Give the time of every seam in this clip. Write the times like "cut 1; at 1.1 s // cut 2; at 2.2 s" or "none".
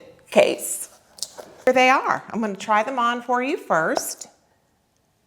cut 1; at 1.7 s